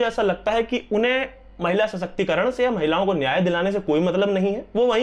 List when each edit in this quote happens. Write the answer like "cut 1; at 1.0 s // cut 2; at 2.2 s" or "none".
none